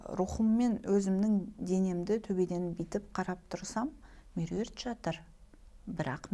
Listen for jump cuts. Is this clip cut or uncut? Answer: uncut